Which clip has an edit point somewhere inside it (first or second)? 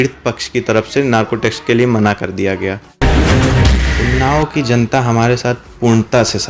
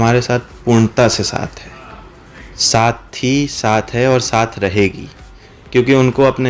first